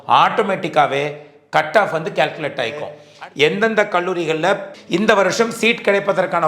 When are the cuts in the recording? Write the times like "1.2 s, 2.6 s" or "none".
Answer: 3.0 s, 4.7 s